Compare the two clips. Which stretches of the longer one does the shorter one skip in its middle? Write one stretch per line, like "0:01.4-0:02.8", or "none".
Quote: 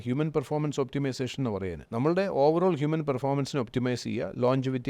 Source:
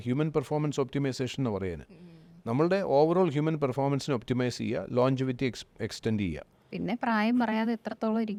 0:01.8-0:02.4